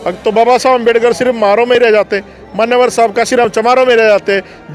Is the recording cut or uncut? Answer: uncut